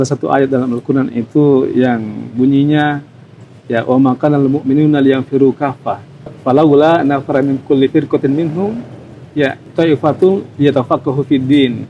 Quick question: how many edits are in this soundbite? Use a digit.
2